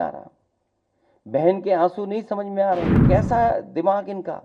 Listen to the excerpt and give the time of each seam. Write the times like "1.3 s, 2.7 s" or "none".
3.0 s